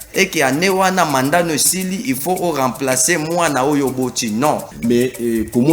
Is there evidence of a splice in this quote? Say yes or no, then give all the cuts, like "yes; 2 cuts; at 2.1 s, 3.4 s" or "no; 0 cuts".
yes; 1 cut; at 4.7 s